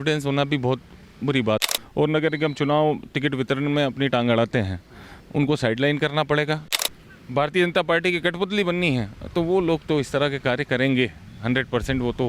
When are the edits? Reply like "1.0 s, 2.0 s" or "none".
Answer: 1.6 s, 6.7 s